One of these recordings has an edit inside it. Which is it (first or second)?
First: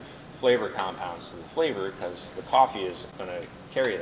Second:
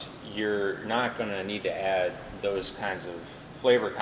first